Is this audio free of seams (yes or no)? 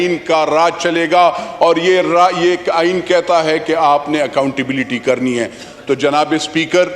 yes